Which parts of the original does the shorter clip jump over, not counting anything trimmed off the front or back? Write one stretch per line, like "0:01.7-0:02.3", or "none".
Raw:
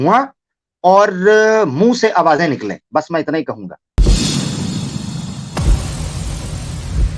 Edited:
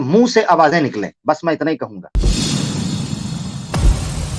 0:03.7-0:03.9